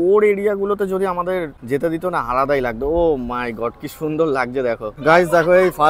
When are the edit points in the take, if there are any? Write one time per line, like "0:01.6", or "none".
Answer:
0:01.6
0:04.9